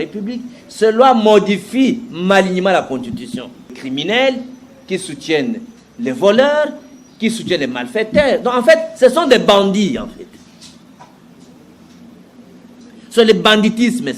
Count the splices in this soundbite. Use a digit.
1